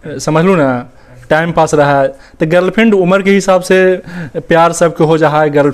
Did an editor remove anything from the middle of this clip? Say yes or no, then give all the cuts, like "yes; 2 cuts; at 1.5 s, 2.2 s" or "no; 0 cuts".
no; 0 cuts